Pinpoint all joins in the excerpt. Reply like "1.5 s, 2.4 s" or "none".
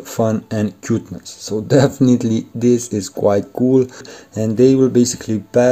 4.1 s